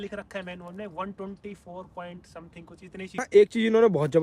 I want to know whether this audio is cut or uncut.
cut